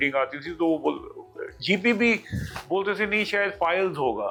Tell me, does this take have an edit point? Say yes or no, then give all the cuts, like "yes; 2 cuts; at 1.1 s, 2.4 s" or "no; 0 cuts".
no; 0 cuts